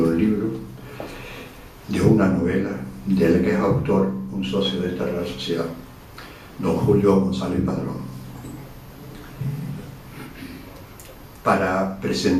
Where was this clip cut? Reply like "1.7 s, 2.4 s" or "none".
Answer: none